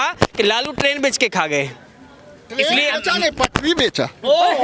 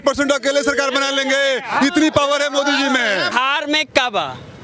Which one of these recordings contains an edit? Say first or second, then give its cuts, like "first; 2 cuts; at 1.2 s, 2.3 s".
second; 1 cut; at 3.3 s